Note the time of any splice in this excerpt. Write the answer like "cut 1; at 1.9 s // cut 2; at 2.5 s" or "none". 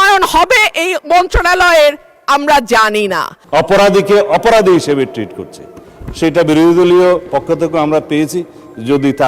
cut 1; at 3.3 s